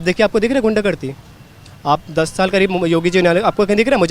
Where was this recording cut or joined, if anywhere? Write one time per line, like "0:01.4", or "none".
none